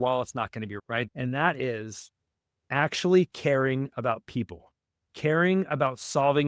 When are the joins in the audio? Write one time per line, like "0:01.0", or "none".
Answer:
0:01.1